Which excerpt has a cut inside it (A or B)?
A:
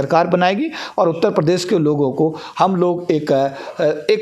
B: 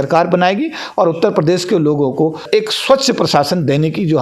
B